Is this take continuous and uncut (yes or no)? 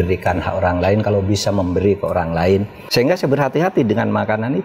yes